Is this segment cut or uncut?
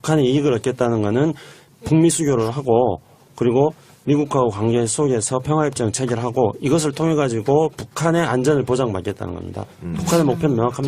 cut